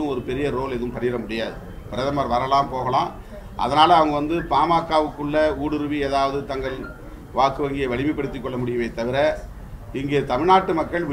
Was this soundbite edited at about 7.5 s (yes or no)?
no